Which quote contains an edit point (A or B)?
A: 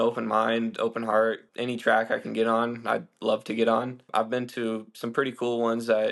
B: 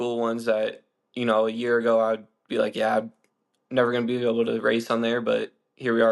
A